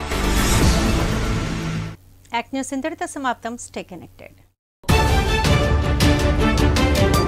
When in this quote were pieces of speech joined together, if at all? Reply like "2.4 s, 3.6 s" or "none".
none